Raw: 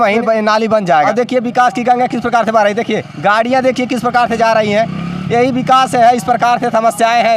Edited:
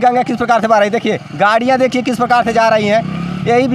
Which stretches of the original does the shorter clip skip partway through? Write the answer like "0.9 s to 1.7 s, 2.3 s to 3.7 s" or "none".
none

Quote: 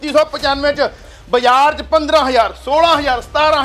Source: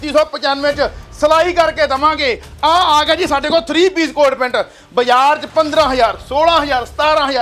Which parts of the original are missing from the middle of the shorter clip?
1.1 s to 4.7 s

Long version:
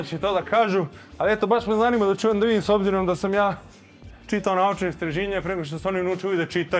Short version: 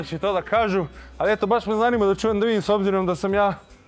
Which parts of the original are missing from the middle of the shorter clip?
none

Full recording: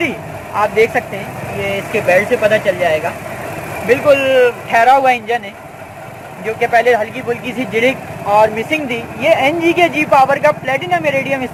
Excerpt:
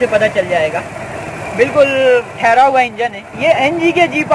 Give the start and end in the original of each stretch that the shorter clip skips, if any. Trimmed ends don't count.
5.6 s to 9.1 s

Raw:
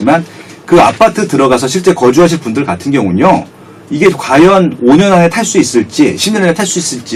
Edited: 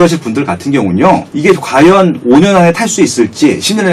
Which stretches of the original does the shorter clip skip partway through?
3.5 s to 3.9 s

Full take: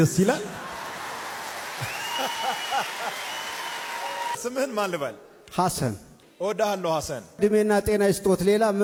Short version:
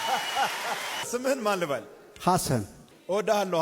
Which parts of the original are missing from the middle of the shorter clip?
3.4 s to 4.4 s

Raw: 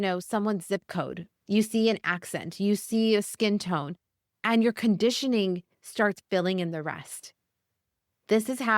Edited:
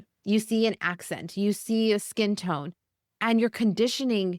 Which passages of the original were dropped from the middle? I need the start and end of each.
none

